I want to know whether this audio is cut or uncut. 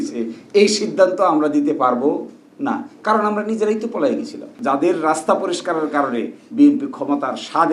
cut